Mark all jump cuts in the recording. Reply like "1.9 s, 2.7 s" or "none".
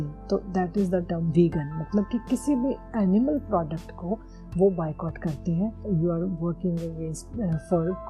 5.8 s